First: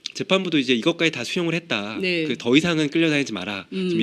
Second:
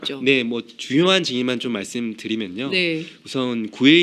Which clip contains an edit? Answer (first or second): first